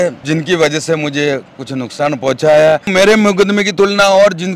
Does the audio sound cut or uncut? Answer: cut